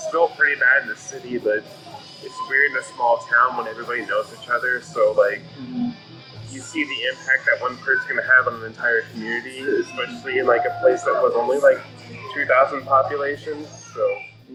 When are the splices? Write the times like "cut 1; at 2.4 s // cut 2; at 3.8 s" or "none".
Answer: none